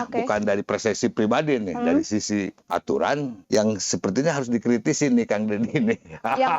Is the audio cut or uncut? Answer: cut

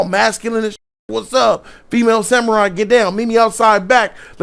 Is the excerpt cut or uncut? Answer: uncut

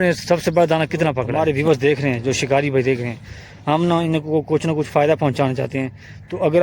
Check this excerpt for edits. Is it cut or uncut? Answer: cut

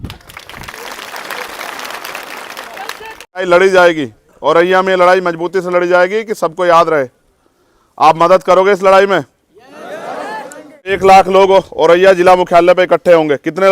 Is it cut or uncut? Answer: cut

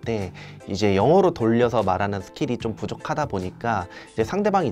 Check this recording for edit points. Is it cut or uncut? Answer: uncut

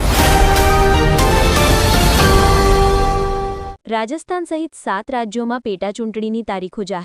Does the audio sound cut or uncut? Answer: cut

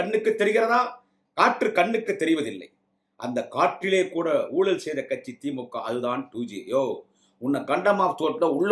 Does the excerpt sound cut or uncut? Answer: uncut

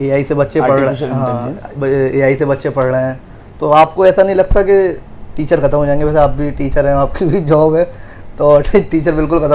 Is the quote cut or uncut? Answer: uncut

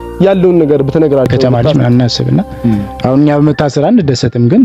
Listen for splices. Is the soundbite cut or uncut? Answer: cut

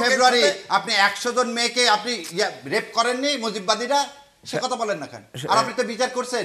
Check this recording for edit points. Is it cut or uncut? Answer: uncut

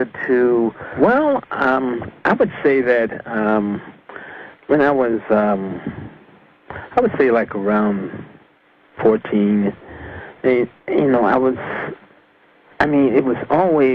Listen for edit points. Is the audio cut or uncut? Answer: cut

